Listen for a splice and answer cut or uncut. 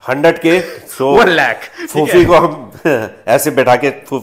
uncut